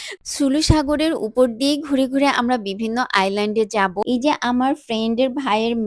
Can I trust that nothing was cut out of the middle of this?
no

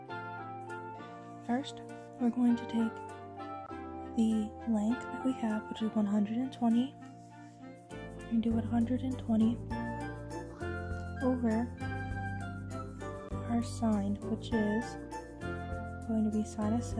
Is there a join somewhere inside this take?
yes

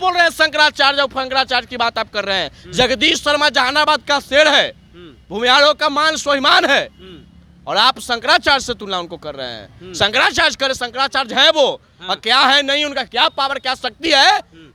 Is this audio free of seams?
yes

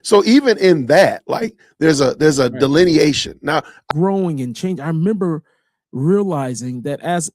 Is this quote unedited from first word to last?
no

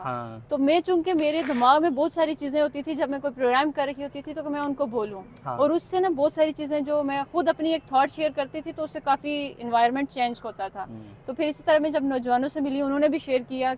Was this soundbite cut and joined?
no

